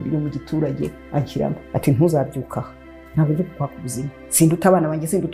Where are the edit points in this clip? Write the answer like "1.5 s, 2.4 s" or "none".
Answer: 3.0 s